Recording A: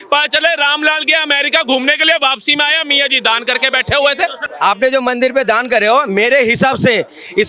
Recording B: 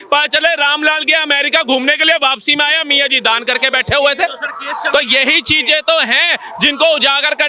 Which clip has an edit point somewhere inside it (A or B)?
A